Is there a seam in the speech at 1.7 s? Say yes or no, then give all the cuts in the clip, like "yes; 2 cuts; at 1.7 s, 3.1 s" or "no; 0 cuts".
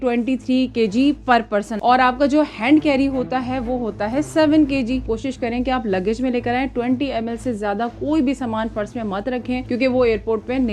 yes; 2 cuts; at 1.7 s, 5.0 s